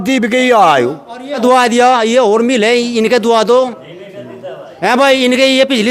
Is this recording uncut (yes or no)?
no